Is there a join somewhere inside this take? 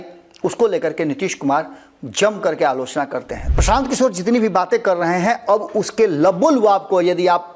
yes; 1 cut; at 3.4 s

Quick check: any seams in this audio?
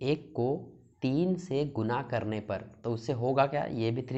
no; 0 cuts

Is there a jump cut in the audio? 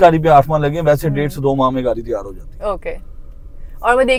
no; 0 cuts

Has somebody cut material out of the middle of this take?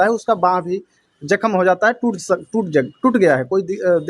no; 0 cuts

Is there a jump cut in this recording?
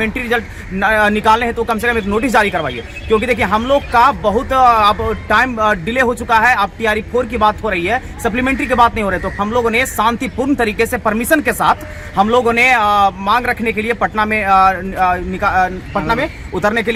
no; 0 cuts

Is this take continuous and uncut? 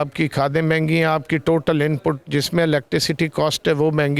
yes; 0 cuts

